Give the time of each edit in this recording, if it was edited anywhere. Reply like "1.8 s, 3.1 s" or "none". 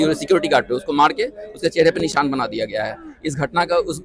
none